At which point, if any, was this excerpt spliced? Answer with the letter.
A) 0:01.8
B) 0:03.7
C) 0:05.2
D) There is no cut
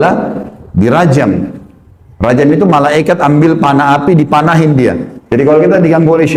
D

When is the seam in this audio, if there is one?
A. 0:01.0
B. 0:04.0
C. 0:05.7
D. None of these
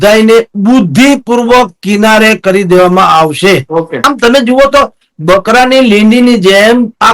B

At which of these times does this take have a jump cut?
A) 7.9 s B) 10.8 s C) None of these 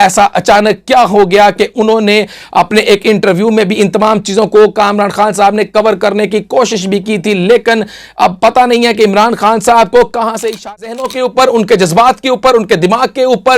B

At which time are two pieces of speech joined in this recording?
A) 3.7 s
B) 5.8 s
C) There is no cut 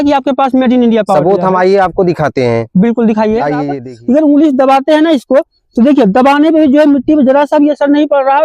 A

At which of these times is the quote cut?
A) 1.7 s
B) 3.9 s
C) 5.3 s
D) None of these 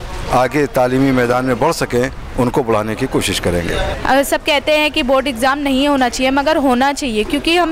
B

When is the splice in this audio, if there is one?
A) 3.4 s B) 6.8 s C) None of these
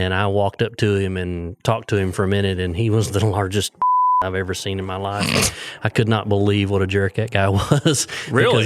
C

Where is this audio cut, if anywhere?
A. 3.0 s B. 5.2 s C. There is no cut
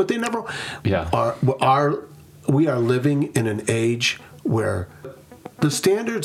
B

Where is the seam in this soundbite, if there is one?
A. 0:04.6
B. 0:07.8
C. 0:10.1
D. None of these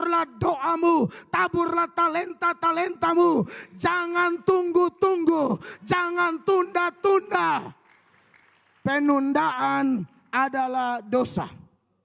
D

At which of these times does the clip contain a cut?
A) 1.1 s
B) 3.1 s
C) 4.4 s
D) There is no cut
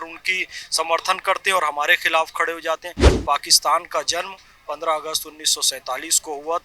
B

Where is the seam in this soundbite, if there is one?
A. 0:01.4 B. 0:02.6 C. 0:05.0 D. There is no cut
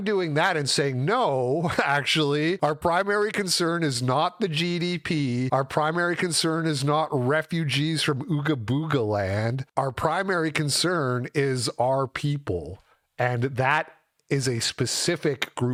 D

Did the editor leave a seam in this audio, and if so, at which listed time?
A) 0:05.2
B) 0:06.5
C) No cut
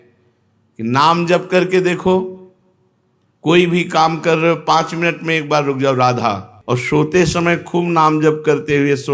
B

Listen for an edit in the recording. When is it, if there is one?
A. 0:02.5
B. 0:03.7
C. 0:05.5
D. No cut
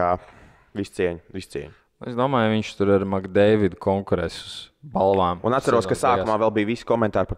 D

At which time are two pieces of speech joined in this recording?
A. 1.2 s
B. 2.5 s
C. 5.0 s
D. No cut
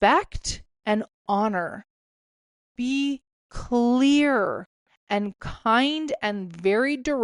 B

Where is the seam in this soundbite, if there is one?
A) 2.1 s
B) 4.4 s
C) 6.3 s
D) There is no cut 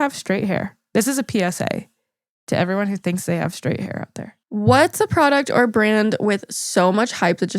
B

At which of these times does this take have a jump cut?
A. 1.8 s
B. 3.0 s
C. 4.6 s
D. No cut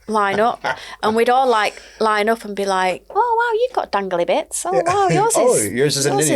B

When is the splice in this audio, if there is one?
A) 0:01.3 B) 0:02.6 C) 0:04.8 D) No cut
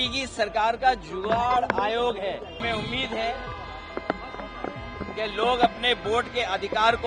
B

